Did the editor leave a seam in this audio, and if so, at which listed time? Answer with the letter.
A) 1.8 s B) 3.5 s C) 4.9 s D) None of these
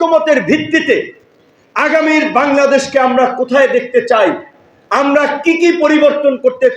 D